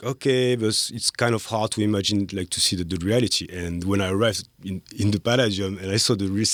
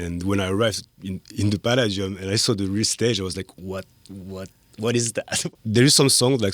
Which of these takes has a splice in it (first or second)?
second